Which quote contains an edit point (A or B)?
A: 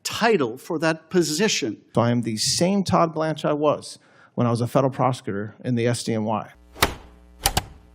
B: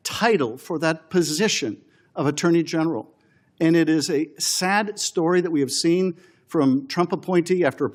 A